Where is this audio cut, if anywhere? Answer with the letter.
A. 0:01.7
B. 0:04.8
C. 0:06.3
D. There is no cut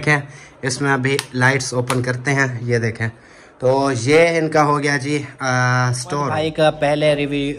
C